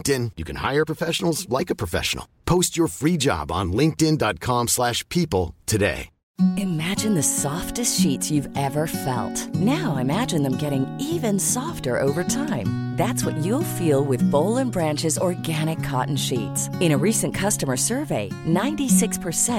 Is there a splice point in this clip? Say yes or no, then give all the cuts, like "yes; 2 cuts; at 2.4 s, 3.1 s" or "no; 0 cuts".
yes; 1 cut; at 6.3 s